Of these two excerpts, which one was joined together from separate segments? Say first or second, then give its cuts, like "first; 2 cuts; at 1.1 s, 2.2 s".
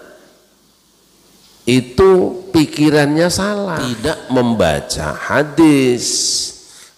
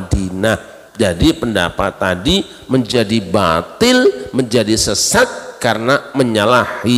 first; 1 cut; at 3.9 s